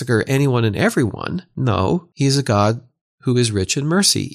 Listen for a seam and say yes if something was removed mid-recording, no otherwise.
yes